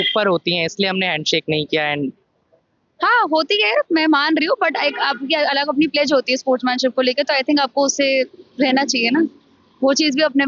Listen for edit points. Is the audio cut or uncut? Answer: uncut